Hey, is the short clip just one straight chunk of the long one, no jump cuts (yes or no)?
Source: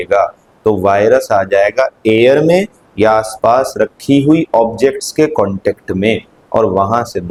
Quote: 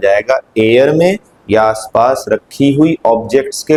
yes